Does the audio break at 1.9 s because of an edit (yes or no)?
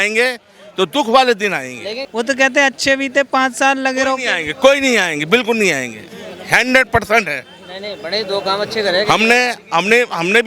yes